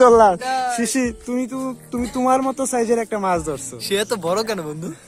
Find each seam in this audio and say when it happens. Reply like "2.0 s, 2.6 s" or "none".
none